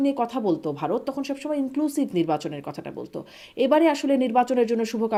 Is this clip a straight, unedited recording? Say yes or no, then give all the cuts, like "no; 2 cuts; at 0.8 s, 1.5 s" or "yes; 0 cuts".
yes; 0 cuts